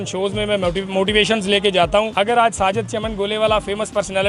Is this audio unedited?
no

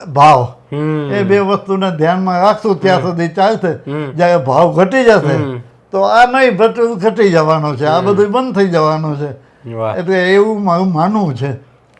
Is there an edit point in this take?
no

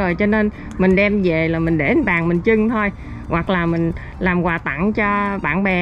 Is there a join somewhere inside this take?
no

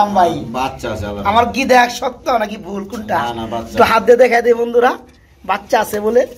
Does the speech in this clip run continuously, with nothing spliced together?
yes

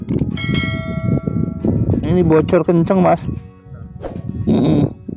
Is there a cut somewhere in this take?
no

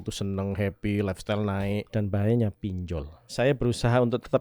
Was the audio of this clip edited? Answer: yes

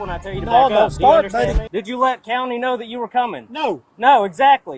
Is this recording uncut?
no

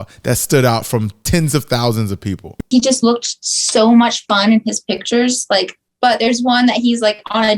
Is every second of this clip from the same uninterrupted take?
no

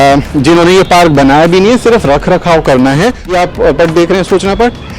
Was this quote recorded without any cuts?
no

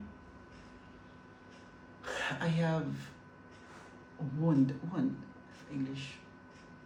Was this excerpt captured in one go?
yes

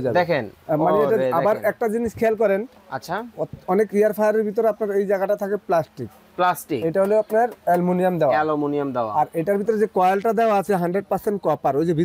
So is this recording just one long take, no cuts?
yes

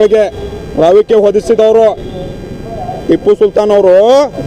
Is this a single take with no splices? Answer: yes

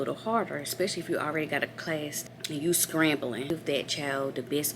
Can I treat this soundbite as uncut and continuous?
no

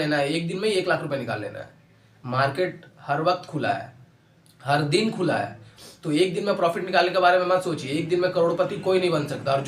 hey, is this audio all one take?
yes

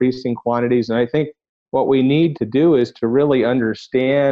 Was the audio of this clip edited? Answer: yes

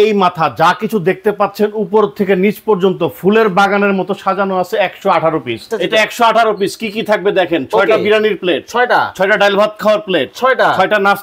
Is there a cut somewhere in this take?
yes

